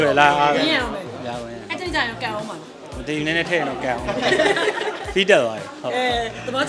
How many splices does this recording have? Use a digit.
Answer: 0